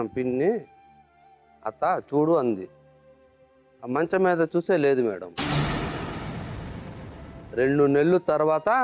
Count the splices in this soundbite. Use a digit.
2